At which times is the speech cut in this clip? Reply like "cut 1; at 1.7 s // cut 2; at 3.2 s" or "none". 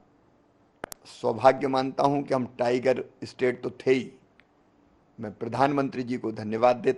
none